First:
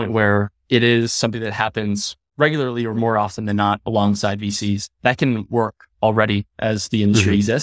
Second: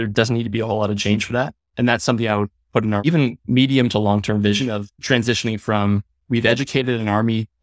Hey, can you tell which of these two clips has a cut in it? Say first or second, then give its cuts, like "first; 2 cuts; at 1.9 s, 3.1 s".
second; 3 cuts; at 3.0 s, 4.9 s, 6.1 s